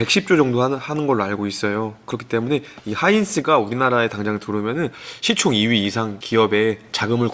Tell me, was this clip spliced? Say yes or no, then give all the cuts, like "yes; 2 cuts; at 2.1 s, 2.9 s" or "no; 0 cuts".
yes; 1 cut; at 6.2 s